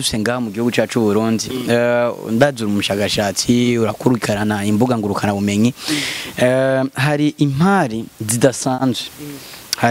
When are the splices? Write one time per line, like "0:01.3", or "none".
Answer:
none